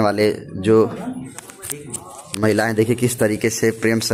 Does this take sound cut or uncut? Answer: uncut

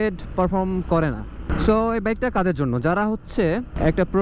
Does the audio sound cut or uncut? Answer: cut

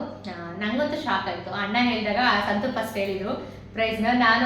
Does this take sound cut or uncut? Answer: uncut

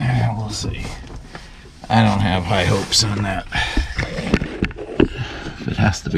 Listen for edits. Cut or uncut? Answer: uncut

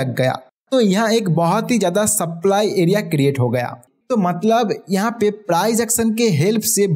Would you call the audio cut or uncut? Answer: cut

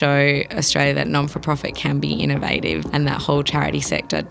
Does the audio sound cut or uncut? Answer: cut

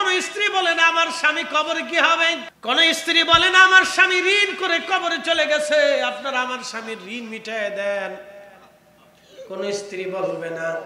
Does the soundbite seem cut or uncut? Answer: cut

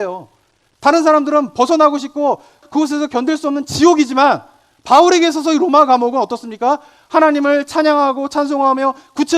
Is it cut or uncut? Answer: cut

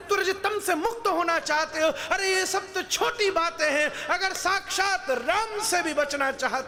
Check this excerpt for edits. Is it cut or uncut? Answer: uncut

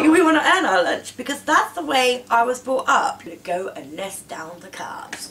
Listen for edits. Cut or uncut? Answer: cut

